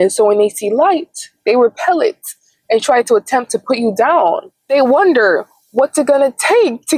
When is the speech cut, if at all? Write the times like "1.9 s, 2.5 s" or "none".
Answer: 4.5 s